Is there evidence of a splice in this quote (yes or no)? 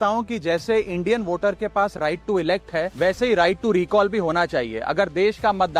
no